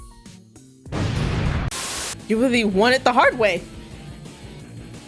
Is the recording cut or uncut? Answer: cut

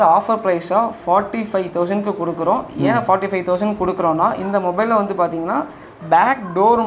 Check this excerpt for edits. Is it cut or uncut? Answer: uncut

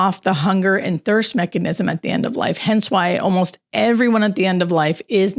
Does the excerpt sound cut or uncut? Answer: uncut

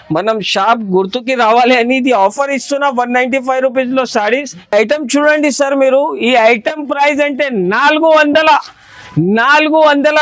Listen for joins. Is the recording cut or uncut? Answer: cut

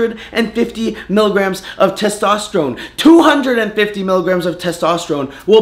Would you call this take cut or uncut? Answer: cut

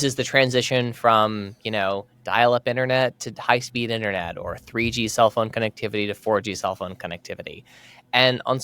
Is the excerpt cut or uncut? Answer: uncut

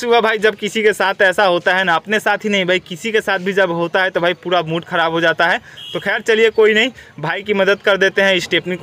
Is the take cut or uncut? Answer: uncut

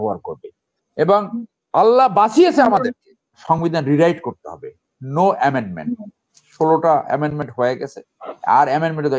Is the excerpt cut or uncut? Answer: cut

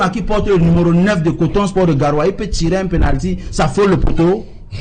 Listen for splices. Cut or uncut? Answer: uncut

